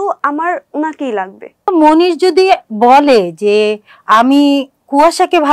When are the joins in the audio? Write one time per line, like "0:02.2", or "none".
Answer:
0:01.7

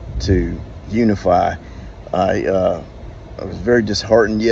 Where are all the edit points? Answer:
0:02.3

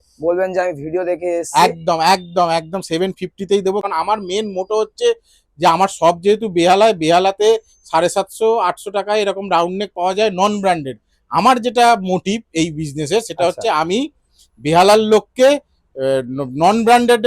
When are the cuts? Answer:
0:03.9

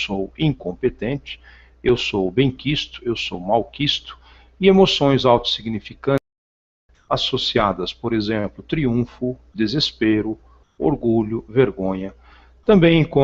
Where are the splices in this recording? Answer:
0:02.6

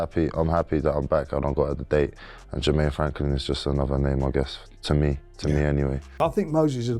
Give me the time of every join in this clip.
0:06.1

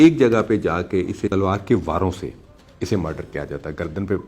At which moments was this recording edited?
0:01.3

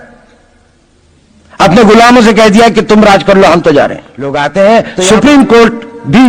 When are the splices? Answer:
0:04.3

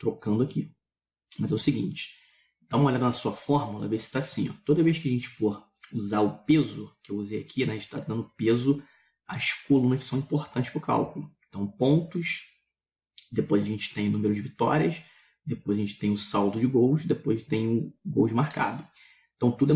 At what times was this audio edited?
none

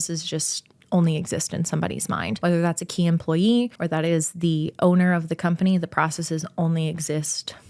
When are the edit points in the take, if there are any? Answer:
0:02.3
0:03.8

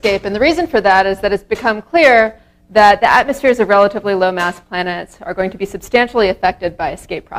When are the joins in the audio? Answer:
none

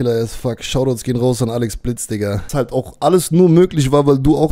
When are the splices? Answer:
0:02.4

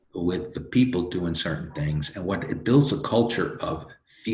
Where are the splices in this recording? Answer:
none

